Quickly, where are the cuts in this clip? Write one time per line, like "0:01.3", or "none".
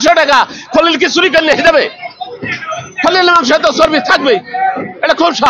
none